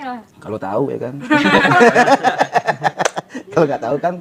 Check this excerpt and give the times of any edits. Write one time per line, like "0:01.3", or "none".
none